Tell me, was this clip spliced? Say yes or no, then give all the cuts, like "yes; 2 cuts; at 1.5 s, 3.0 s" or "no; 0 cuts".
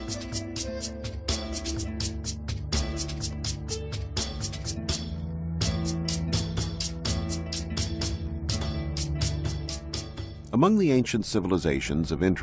no; 0 cuts